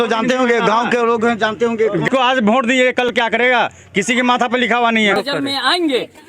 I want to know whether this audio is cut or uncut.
cut